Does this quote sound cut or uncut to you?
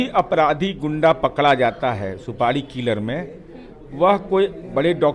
uncut